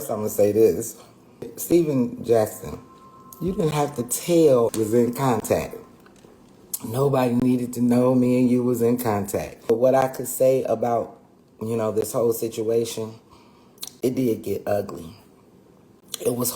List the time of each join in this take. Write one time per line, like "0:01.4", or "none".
0:01.6
0:04.7
0:09.7